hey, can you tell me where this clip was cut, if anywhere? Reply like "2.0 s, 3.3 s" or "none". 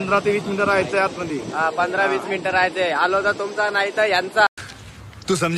4.5 s